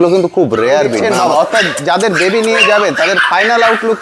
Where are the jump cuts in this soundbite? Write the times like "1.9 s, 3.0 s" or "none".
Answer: 0.9 s